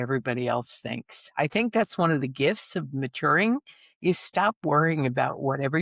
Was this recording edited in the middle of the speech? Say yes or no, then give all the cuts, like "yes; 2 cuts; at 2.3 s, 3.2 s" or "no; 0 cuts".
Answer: no; 0 cuts